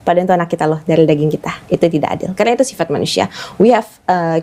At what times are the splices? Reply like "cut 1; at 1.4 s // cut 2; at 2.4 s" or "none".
cut 1; at 1.5 s